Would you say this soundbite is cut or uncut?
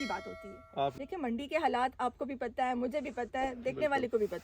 cut